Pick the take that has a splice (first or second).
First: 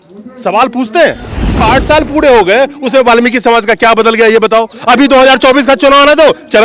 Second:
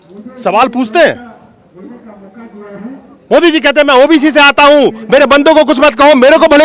first